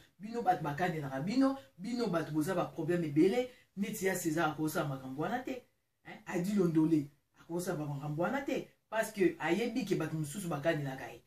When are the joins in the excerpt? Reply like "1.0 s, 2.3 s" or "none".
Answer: none